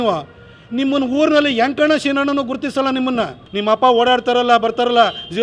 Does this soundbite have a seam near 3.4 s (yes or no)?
yes